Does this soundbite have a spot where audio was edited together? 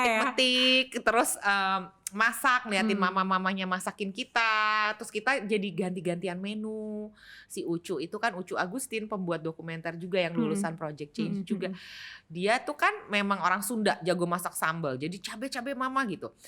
no; 0 cuts

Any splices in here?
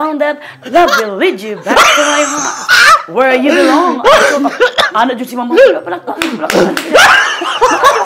no; 0 cuts

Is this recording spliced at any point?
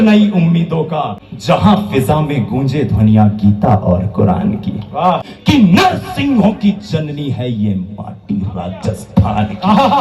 yes; 2 cuts; at 1.3 s, 5.3 s

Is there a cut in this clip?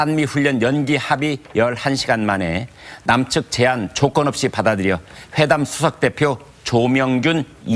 no; 0 cuts

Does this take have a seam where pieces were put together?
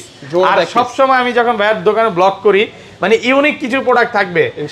no; 0 cuts

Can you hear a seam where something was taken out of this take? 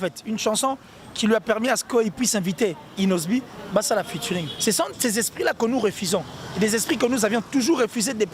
yes; 1 cut; at 4.5 s

